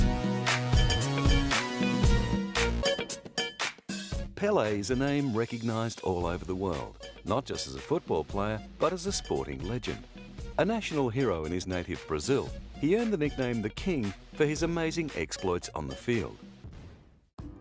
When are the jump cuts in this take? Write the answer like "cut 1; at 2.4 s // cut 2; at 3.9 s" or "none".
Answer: none